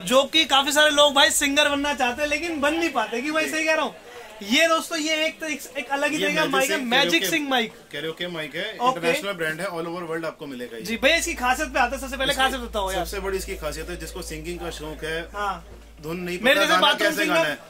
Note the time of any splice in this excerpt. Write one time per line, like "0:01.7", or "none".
none